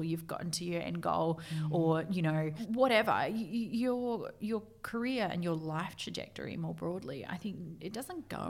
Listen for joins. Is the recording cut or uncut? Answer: cut